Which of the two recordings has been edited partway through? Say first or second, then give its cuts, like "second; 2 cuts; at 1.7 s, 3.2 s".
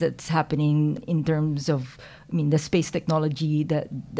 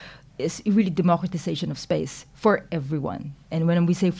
first; 1 cut; at 1.0 s